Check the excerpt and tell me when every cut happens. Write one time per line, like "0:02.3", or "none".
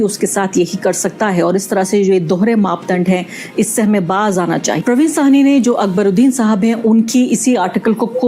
0:04.8